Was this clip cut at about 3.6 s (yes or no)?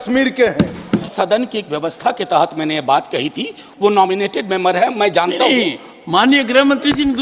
no